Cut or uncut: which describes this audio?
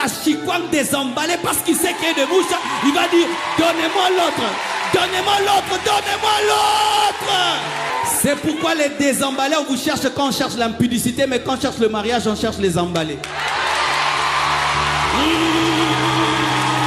cut